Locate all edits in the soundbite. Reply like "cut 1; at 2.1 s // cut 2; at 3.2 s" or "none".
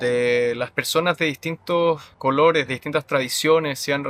cut 1; at 2.1 s

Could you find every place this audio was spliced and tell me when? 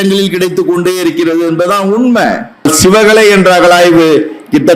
cut 1; at 2.6 s

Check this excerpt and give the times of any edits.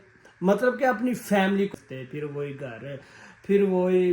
cut 1; at 1.7 s

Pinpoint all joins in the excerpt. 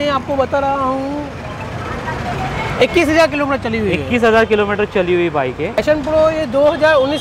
cut 1; at 5.8 s

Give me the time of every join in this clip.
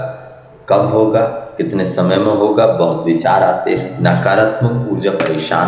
cut 1; at 3.9 s

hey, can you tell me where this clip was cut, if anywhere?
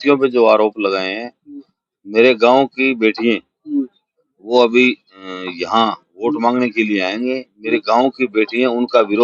none

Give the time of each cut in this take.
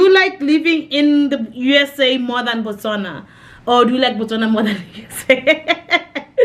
none

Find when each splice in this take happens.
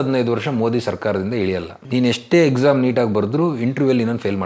cut 1; at 1.8 s

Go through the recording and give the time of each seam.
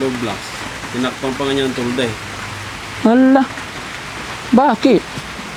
none

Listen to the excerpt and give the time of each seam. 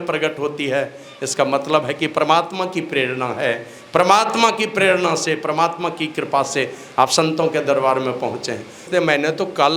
cut 1; at 8.9 s

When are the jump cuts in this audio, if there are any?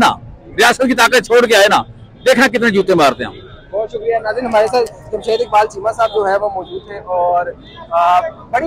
none

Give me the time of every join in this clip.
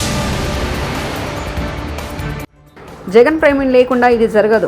cut 1; at 2.5 s

